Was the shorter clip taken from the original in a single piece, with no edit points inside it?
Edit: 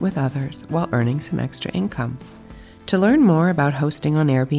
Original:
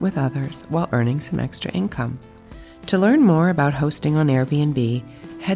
yes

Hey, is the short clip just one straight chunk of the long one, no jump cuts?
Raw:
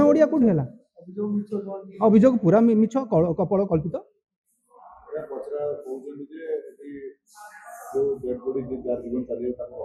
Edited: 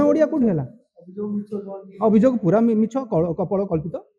yes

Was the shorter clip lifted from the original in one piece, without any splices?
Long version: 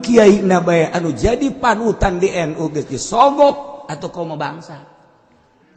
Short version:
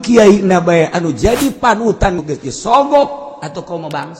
no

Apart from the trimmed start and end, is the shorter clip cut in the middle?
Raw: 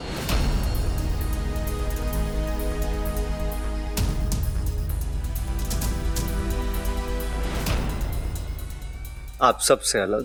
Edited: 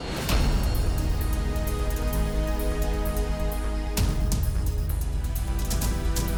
no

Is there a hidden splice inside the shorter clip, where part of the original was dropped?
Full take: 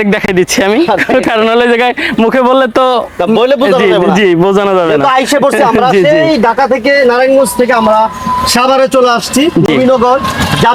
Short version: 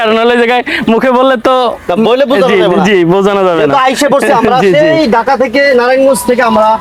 no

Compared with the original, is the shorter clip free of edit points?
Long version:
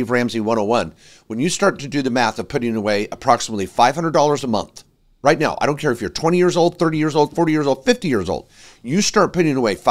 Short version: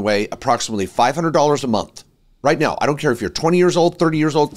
yes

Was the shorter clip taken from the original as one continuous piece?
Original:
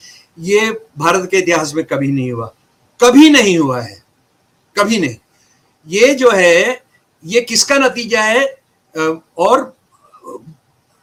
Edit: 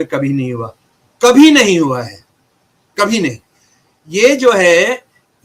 yes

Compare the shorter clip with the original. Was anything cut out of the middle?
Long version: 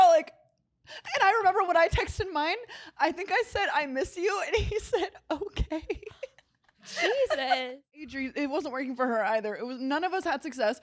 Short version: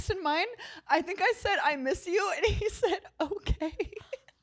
no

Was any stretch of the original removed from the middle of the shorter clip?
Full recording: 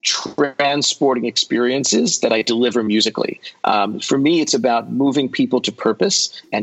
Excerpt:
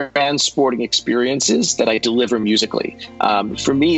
no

